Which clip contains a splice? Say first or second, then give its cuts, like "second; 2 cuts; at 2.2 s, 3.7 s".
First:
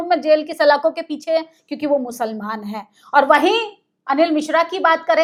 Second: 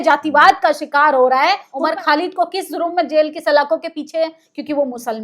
second; 1 cut; at 1.7 s